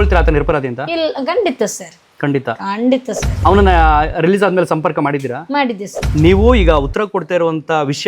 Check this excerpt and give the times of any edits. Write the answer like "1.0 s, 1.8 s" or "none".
3.3 s, 5.9 s